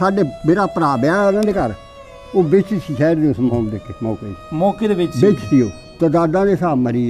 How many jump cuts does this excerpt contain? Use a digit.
1